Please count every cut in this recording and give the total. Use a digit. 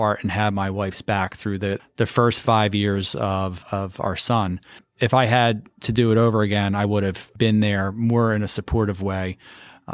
4